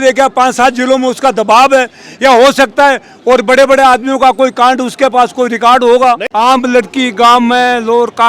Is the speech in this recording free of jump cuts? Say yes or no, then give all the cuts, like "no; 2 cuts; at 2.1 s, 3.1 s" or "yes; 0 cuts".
no; 1 cut; at 6.2 s